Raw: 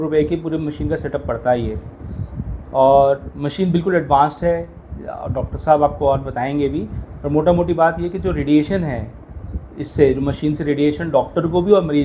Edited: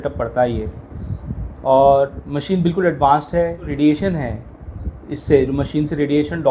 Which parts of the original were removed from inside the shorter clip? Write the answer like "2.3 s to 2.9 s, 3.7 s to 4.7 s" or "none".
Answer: 4.8 s to 8.4 s